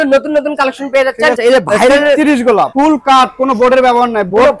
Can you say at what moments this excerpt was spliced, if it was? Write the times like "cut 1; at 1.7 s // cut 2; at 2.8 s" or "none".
cut 1; at 1.4 s // cut 2; at 2.7 s